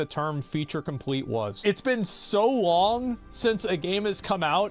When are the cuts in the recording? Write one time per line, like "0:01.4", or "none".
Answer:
0:01.6